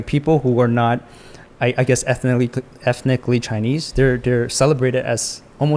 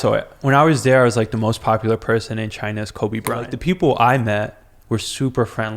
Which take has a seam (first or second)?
second